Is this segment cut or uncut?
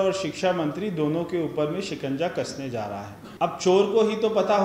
cut